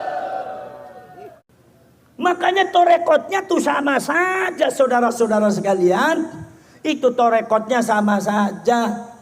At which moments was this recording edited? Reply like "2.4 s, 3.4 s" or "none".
1.5 s